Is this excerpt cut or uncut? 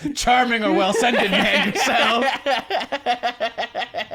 uncut